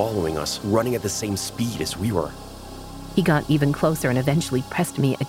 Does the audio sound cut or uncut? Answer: cut